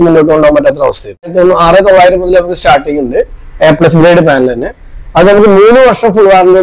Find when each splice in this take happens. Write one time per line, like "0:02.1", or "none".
0:01.3